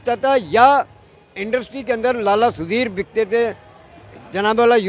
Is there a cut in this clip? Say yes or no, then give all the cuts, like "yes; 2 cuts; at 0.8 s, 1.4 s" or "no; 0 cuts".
no; 0 cuts